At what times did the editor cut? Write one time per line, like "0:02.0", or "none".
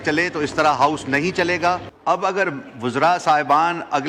0:01.9